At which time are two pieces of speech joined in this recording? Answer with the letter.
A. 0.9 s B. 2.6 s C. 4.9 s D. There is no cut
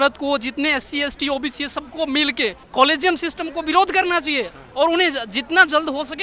B